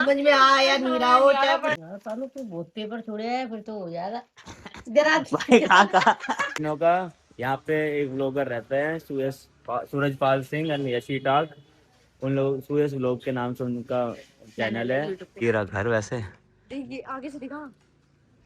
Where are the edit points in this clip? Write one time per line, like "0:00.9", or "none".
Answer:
0:01.8
0:06.6
0:15.4